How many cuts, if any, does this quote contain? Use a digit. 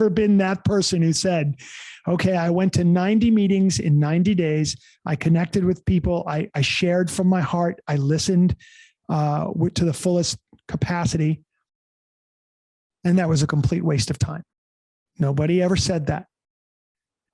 0